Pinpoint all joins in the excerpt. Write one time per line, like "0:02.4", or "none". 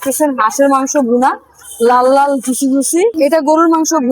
0:03.1